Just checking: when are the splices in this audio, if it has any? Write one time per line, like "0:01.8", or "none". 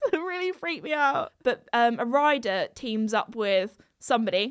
0:01.3